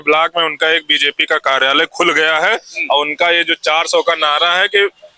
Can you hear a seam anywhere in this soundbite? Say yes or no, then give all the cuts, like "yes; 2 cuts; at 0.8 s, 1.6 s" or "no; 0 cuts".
no; 0 cuts